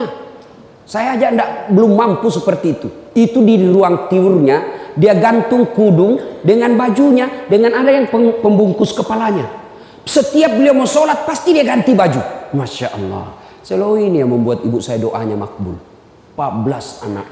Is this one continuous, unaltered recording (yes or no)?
no